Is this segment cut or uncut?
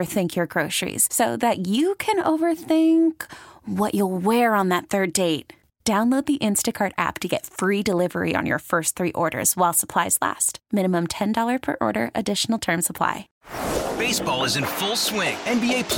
cut